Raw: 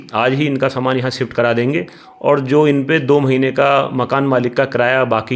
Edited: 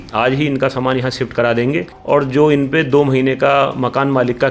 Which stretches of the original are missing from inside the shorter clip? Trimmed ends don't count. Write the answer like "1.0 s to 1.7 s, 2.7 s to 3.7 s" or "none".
1.9 s to 2.1 s

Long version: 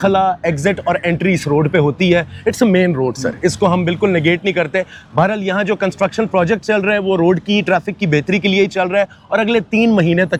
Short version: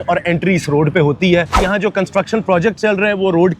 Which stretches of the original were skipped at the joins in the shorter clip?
2.3 s to 5.4 s

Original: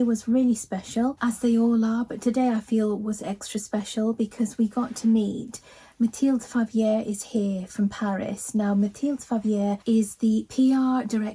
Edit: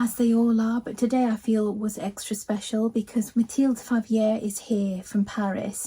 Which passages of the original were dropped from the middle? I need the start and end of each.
4.5 s to 5.9 s

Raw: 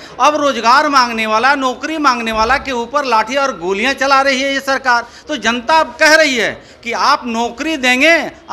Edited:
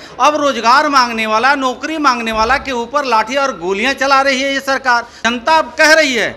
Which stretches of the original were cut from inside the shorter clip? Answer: 5.1 s to 5.4 s

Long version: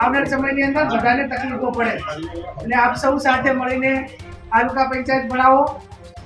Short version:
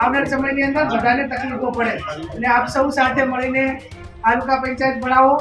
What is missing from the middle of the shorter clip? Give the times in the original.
2.2 s to 2.5 s

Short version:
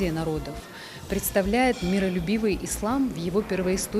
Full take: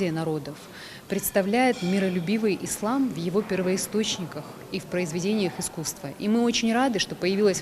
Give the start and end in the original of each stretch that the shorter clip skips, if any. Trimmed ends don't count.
none

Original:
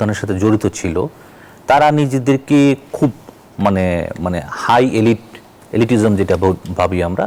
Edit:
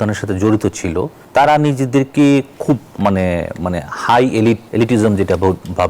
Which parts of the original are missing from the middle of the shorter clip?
1.2 s to 1.5 s, 3.2 s to 3.5 s, 5.3 s to 5.7 s

